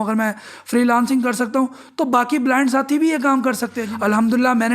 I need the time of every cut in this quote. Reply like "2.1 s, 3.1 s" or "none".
3.8 s